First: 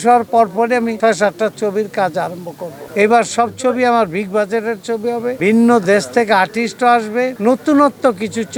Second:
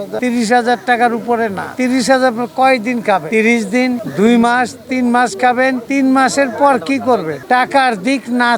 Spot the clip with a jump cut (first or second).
second